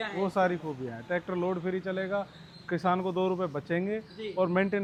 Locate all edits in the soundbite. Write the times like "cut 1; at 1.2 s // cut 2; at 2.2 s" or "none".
none